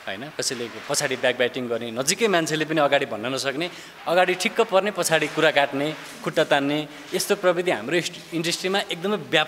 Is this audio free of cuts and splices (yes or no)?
yes